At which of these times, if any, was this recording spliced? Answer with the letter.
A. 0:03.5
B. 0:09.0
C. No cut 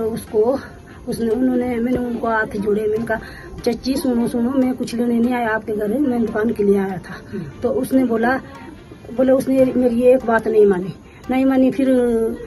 C